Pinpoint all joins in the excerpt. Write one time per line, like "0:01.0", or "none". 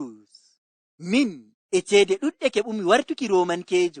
0:01.5